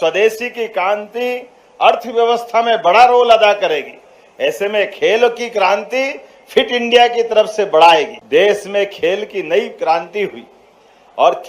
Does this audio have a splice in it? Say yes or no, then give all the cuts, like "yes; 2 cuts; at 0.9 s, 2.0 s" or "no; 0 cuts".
yes; 1 cut; at 8.2 s